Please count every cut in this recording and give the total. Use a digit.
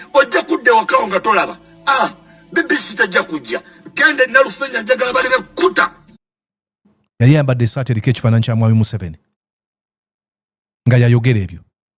0